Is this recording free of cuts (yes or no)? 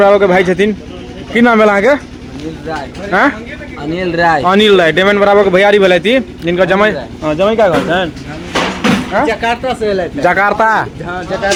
yes